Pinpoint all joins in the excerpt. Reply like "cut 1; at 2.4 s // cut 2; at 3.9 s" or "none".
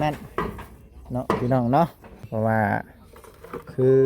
cut 1; at 2.2 s